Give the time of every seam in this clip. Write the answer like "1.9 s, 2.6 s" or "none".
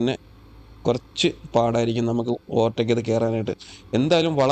none